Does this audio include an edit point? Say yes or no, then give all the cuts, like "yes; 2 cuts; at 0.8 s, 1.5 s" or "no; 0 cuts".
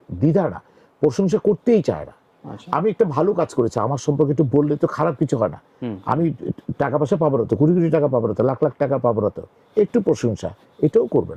no; 0 cuts